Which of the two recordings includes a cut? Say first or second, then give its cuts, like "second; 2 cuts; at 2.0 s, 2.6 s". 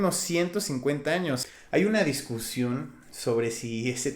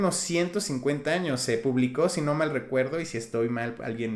first; 1 cut; at 1.4 s